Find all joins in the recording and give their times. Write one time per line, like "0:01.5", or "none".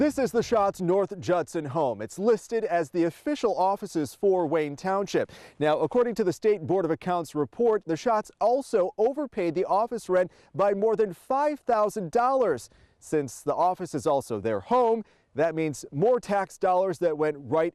none